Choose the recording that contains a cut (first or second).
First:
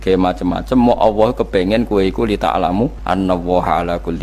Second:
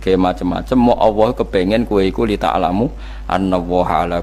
first